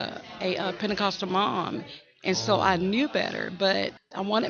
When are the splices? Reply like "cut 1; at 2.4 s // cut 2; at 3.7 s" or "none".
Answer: none